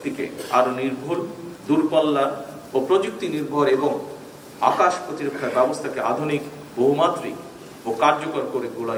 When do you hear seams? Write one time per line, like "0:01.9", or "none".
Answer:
none